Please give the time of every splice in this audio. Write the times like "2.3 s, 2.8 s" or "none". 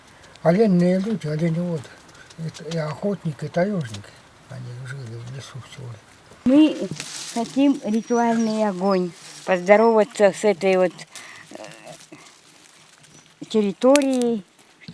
6.5 s